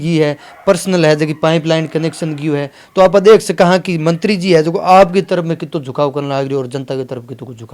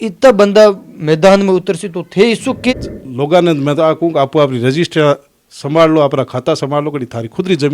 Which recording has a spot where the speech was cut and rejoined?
second; 1 cut; at 2.7 s

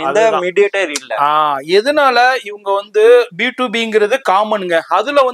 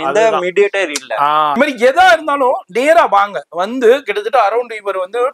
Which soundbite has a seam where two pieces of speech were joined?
second; 1 cut; at 1.6 s

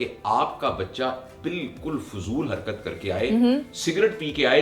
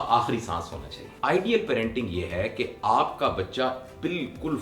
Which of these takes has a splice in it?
second; 1 cut; at 1.1 s

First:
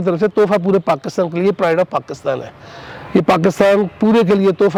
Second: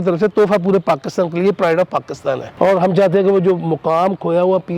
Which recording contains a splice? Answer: second; 1 cut; at 2.5 s

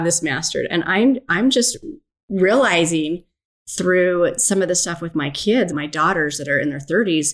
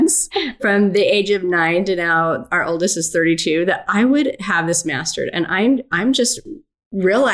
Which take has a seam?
first; 1 cut; at 5.7 s

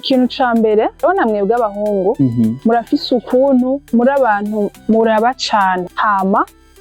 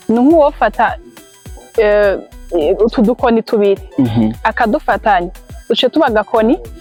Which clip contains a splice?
first; 4 cuts; at 1.0 s, 2.6 s, 3.8 s, 5.9 s

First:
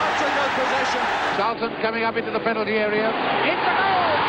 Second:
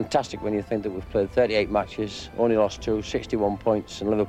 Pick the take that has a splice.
first; 2 cuts; at 1.3 s, 3.1 s

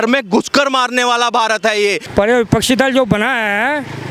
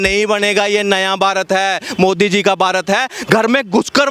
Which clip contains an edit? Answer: first; 1 cut; at 2.0 s

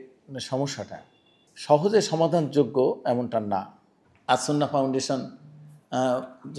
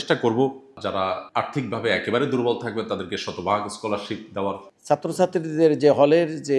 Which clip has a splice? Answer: second; 2 cuts; at 0.9 s, 4.7 s

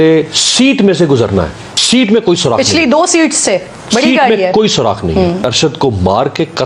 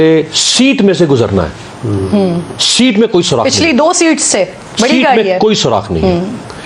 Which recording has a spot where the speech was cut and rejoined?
first; 2 cuts; at 1.7 s, 5.5 s

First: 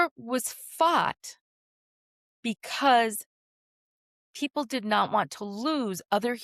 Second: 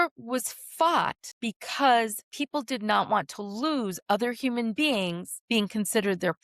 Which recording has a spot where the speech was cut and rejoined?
second; 3 cuts; at 1.3 s, 2.2 s, 5.3 s

